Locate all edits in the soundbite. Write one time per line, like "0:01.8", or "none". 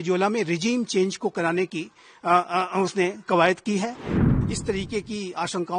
0:04.2